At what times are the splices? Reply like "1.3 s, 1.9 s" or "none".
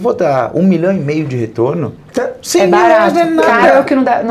none